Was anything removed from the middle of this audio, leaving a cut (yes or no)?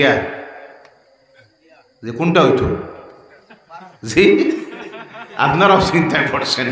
no